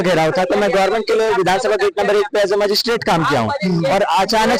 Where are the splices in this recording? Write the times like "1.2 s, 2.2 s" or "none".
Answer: none